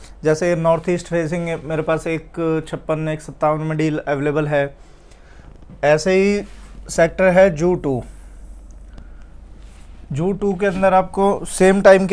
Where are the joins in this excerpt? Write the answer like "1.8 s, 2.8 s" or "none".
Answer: none